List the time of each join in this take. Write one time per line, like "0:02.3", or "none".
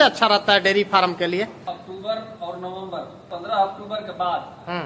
0:01.6
0:03.2